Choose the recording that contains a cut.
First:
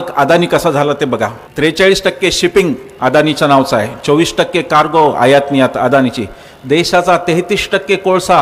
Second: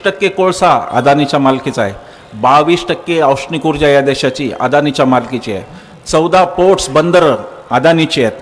first; 1 cut; at 1.4 s

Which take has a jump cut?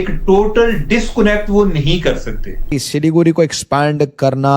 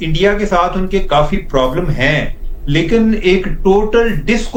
first; 1 cut; at 2.7 s

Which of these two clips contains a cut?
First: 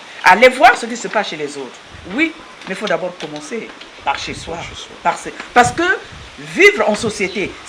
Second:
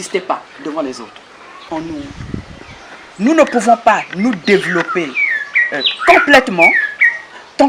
second; 1 cut; at 1.7 s

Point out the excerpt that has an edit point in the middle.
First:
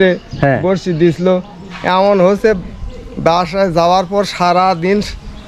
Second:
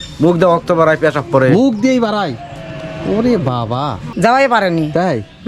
second; 1 cut; at 4.1 s

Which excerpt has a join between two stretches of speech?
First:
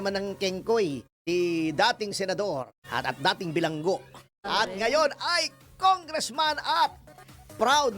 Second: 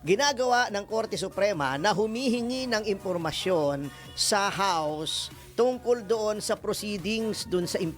first; 3 cuts; at 1.1 s, 2.8 s, 4.3 s

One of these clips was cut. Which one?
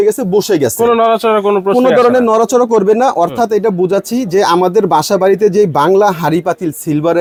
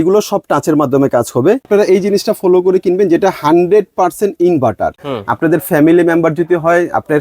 second; 2 cuts; at 1.7 s, 5.0 s

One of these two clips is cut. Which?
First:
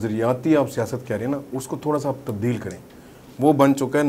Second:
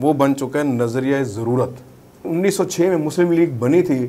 second; 1 cut; at 2.3 s

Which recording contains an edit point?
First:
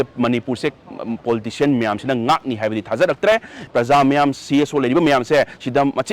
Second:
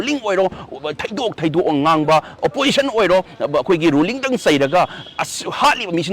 first; 1 cut; at 3.6 s

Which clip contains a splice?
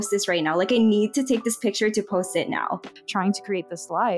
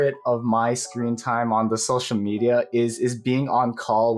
first; 1 cut; at 2.9 s

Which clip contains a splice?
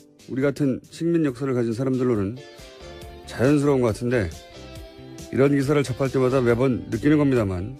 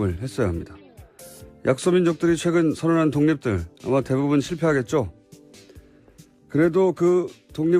second; 1 cut; at 1.7 s

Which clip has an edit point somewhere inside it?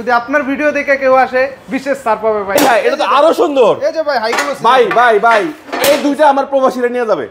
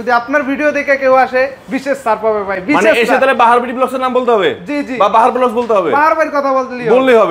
first; 1 cut; at 2.6 s

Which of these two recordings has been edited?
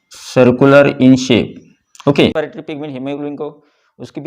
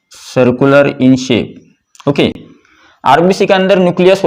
first; 1 cut; at 2.3 s

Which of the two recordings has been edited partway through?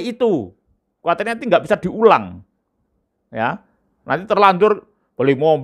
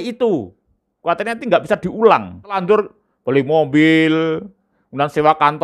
second; 1 cut; at 2.6 s

